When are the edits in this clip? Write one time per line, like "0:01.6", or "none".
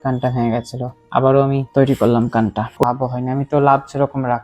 0:02.8